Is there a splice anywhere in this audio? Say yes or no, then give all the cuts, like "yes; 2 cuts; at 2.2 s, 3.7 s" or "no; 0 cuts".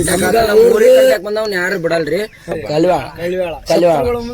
yes; 1 cut; at 2.6 s